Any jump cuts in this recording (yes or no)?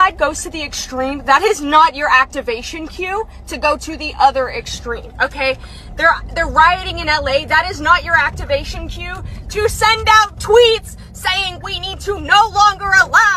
no